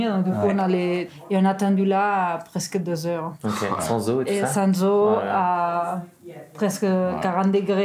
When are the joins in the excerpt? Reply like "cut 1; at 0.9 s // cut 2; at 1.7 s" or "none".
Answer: cut 1; at 1.1 s